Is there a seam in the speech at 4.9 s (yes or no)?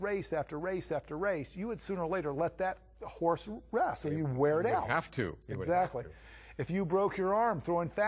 no